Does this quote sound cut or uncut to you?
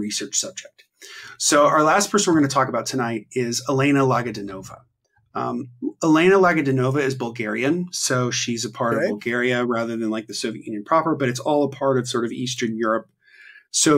uncut